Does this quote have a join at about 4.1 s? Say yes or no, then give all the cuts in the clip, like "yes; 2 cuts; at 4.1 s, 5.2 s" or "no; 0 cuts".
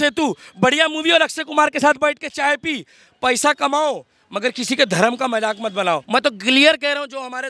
no; 1 cut; at 6.0 s